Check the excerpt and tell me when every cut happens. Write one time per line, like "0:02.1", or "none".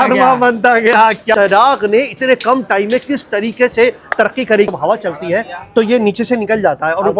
0:01.3
0:04.7